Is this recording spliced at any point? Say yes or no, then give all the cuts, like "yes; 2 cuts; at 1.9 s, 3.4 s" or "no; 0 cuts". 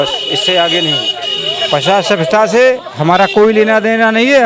no; 0 cuts